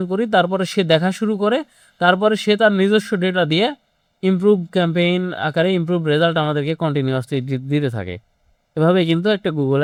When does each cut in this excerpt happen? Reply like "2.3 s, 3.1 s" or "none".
none